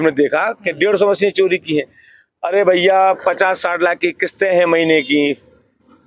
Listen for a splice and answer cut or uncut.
uncut